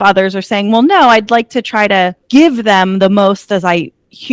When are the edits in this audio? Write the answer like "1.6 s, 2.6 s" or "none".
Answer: 2.2 s